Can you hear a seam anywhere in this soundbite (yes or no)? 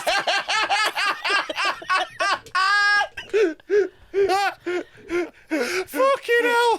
no